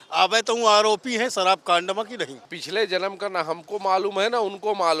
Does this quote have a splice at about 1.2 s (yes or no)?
no